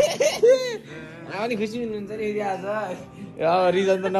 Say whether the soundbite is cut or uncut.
uncut